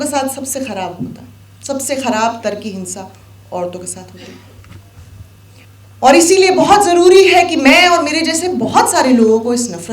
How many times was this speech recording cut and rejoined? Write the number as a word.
one